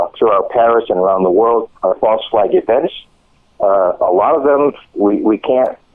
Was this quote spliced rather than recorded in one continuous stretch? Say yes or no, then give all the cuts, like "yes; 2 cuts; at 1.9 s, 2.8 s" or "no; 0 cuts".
no; 0 cuts